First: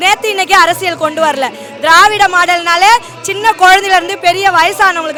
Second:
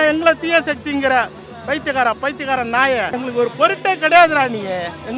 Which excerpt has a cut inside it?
second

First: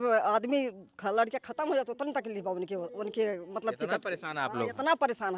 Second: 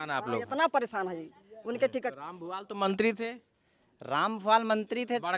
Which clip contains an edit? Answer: second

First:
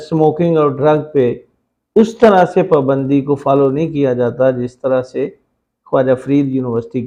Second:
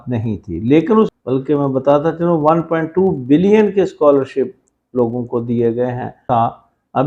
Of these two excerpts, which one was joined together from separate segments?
second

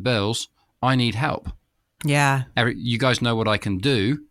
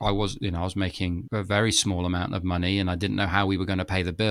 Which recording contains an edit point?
second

